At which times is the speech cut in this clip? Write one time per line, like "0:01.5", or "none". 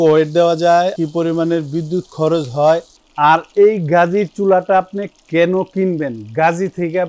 0:00.9
0:03.0